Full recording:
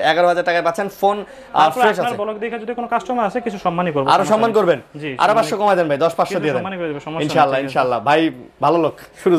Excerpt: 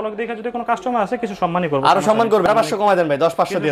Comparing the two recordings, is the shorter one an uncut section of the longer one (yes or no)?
no